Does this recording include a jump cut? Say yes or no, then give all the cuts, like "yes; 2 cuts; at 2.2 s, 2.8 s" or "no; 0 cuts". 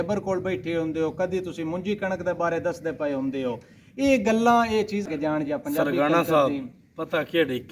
yes; 1 cut; at 5.1 s